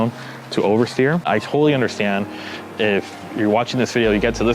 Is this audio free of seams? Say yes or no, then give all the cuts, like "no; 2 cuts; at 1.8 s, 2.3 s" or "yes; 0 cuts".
no; 1 cut; at 1.2 s